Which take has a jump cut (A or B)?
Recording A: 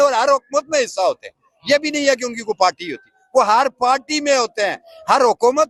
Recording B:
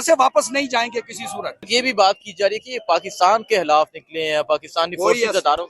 B